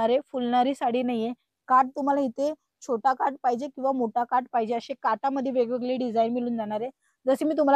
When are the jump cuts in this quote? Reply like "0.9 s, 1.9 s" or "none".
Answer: none